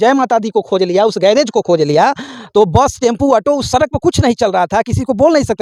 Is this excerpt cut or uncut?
uncut